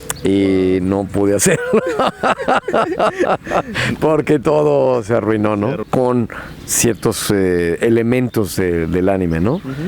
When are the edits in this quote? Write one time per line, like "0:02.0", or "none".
0:05.8